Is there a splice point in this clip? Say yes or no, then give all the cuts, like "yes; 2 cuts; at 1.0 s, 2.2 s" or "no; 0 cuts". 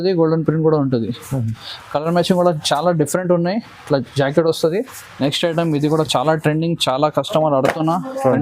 yes; 1 cut; at 5.0 s